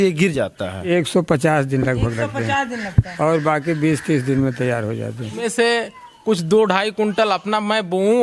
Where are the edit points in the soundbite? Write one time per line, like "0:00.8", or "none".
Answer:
0:00.9
0:05.4